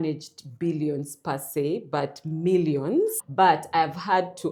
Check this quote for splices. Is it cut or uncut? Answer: uncut